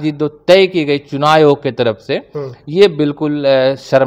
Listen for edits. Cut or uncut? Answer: uncut